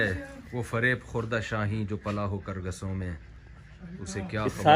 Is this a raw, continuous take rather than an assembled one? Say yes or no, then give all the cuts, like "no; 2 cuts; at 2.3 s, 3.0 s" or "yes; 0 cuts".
yes; 0 cuts